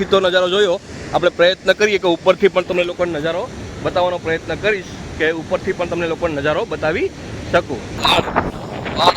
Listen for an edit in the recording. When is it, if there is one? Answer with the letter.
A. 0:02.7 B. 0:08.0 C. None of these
B